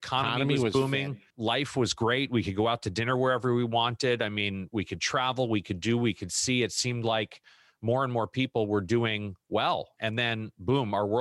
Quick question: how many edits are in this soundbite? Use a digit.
2